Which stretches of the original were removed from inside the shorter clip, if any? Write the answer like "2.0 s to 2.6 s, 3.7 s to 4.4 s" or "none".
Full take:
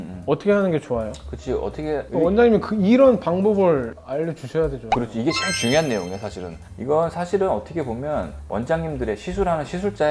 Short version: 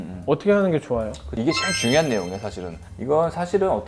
1.3 s to 5.1 s